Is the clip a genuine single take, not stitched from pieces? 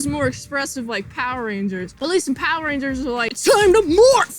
no; 1 cut; at 3.3 s

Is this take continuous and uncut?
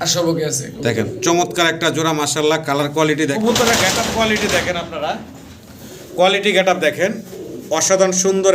no; 1 cut; at 3.3 s

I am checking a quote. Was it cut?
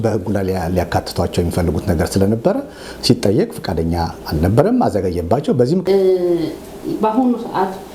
yes; 1 cut; at 5.8 s

